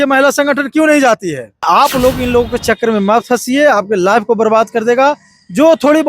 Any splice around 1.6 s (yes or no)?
yes